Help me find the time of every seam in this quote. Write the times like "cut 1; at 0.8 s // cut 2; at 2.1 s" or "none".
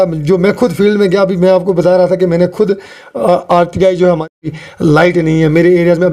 cut 1; at 4.3 s